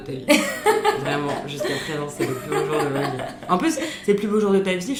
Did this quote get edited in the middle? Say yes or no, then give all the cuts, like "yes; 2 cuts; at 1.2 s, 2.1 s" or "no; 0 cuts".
no; 0 cuts